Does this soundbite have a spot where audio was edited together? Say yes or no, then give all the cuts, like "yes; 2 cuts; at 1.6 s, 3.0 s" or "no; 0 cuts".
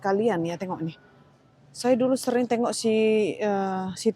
yes; 1 cut; at 1.7 s